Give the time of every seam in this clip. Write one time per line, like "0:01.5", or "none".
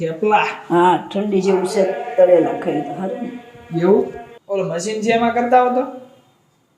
0:04.2